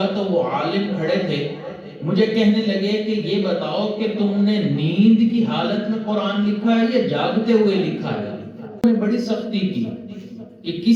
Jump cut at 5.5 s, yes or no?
no